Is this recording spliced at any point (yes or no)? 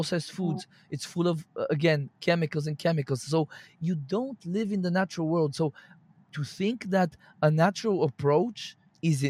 yes